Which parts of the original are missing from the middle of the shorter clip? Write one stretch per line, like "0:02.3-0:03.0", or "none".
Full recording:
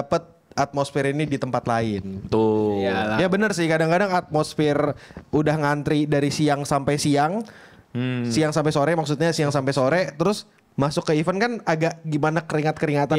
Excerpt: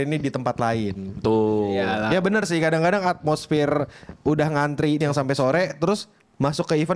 0:06.1-0:09.4